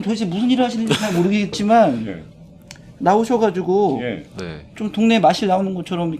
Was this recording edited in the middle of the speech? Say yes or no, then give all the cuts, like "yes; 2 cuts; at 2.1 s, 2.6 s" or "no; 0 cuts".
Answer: no; 0 cuts